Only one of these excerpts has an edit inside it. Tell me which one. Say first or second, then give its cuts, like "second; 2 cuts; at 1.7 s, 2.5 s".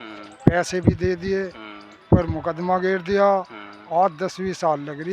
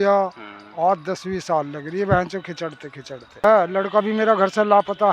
second; 1 cut; at 3.4 s